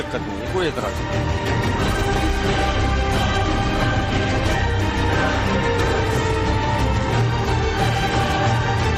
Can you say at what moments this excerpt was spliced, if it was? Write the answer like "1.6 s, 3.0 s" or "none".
5.8 s